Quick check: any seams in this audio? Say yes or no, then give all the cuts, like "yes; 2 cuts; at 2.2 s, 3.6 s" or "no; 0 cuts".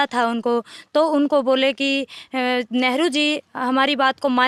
no; 0 cuts